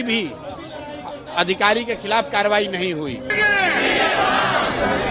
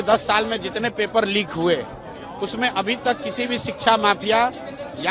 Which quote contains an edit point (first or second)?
first